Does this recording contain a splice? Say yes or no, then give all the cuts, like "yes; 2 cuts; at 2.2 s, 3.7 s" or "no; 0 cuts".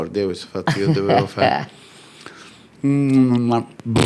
no; 0 cuts